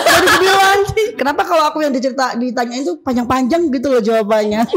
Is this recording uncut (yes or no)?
no